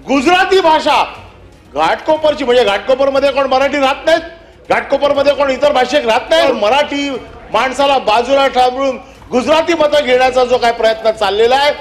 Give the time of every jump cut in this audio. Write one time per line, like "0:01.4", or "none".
0:06.5

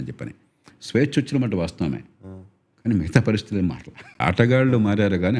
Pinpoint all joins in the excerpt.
0:04.1

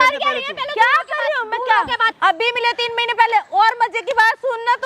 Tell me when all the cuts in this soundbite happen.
0:02.1

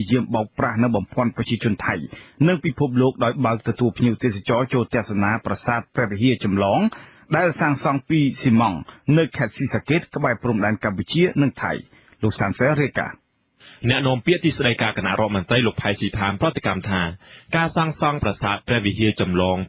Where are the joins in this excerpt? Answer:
none

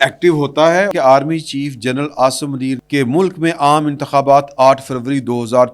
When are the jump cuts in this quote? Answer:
0:00.9
0:02.8

